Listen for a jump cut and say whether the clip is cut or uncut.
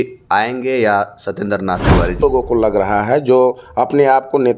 cut